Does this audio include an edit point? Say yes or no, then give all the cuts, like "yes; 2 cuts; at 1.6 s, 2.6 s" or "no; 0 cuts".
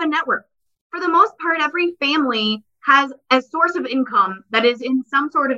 no; 0 cuts